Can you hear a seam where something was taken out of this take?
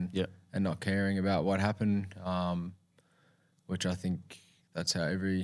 no; 0 cuts

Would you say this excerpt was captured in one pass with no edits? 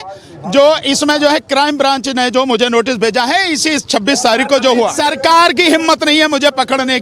no; 1 cut; at 5.0 s

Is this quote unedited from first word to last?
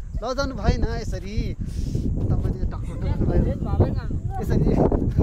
yes; 0 cuts

